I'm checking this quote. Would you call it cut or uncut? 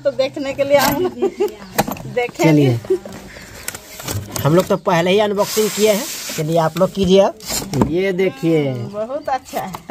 uncut